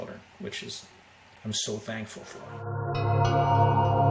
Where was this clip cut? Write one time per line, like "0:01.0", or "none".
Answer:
0:02.4